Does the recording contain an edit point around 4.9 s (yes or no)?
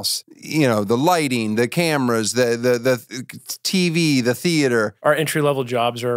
yes